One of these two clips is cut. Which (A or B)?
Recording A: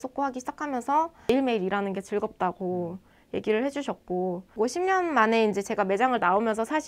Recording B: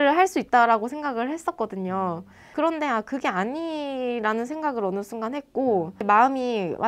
A